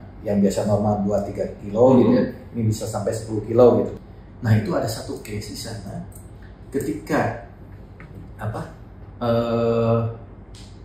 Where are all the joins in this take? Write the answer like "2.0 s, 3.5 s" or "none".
4.0 s